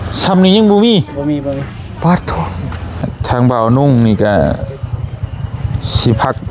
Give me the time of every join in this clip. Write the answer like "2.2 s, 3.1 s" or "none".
3.1 s